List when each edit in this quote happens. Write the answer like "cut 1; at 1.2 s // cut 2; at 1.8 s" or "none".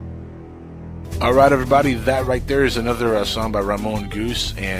cut 1; at 1.0 s